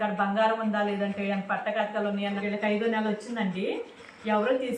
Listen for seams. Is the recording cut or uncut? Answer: cut